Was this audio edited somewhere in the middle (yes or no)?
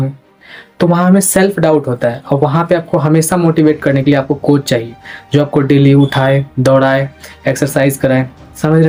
no